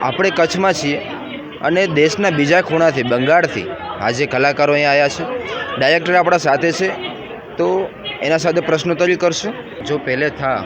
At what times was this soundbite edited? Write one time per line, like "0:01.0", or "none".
0:09.7